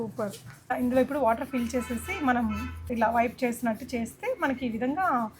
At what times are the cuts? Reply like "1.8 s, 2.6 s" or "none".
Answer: 0.7 s, 2.9 s